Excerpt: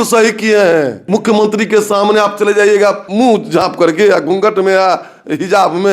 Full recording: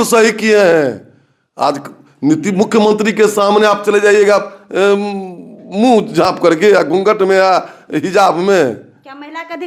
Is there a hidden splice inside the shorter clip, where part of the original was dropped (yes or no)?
yes